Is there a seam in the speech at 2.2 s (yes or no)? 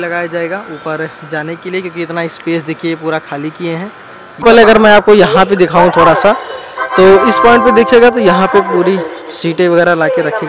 no